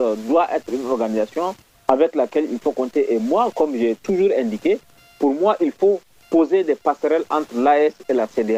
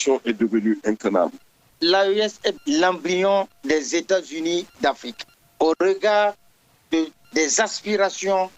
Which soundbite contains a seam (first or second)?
second